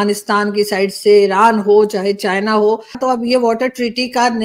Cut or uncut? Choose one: cut